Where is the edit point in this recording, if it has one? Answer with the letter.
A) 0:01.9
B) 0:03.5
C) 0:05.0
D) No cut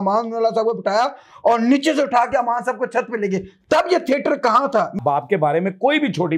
C